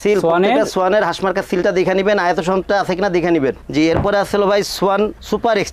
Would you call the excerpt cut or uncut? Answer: uncut